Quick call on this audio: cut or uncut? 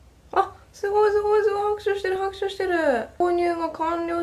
cut